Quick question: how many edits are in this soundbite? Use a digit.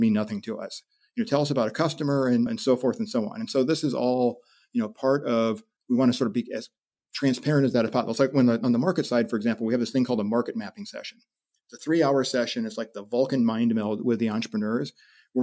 0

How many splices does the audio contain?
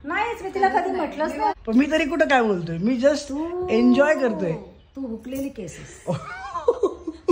1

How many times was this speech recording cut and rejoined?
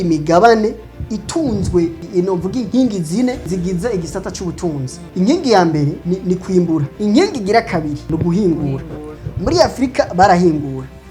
3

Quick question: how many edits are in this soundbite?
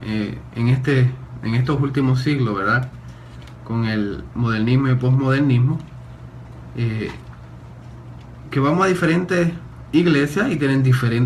1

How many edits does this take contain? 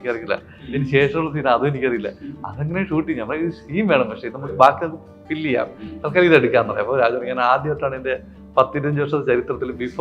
0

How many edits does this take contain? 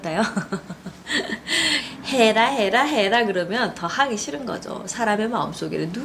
1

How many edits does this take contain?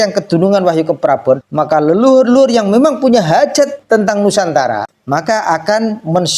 3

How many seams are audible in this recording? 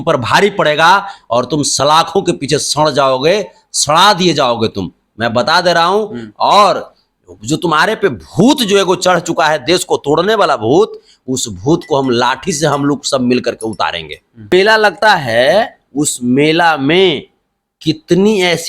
1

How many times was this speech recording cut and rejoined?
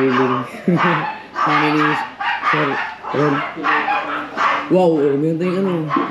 0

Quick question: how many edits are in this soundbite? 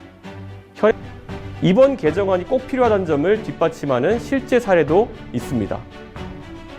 1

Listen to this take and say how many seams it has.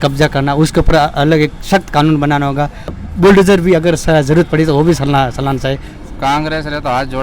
2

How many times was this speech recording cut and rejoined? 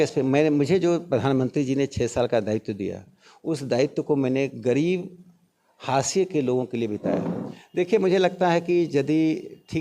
1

